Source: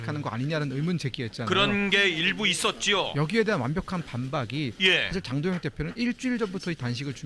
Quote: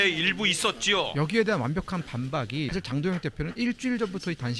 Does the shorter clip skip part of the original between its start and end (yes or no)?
yes